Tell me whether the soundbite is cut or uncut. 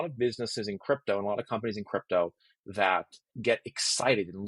cut